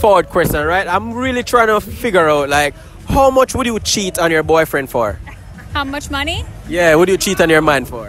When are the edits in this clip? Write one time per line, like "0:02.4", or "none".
none